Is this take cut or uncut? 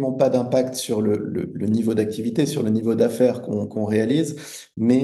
uncut